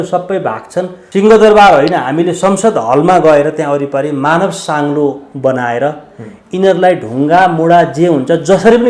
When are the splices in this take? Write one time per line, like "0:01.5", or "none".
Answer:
0:01.0

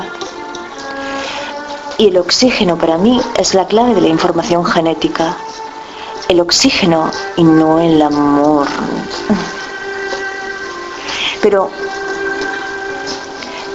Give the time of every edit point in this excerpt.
0:02.6

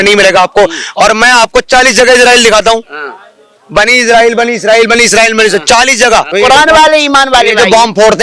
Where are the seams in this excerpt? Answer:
0:06.3

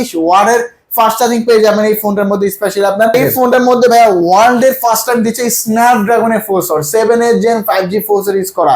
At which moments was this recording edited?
0:03.1

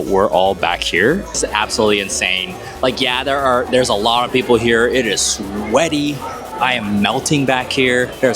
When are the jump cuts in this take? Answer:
0:01.3

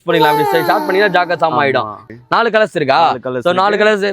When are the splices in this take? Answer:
0:02.0

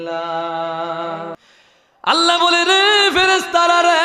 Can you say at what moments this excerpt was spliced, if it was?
0:01.4

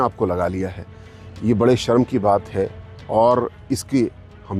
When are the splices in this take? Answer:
none

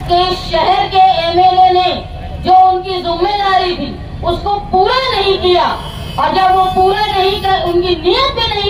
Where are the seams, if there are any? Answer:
none

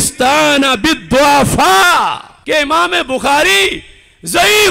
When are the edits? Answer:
0:02.3

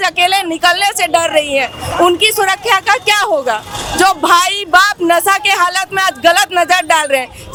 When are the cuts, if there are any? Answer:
none

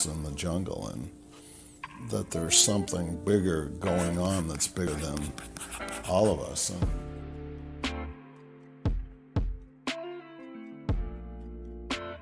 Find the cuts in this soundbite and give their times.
0:04.9

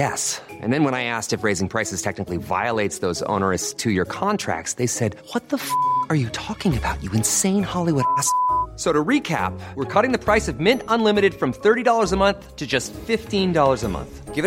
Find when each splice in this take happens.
none

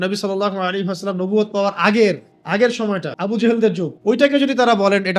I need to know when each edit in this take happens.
0:02.8
0:03.9

